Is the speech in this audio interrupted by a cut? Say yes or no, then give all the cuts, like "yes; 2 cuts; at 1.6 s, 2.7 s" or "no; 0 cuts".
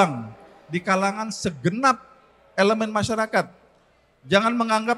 no; 0 cuts